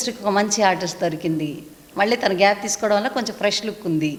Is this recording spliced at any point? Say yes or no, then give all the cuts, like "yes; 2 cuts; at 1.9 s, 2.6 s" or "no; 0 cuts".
no; 0 cuts